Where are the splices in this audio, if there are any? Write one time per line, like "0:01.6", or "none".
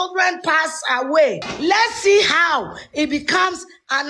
0:01.5